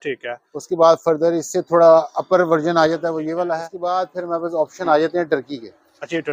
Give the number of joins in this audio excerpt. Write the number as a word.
one